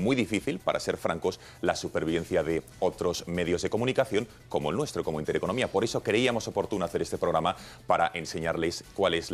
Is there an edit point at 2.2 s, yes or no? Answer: no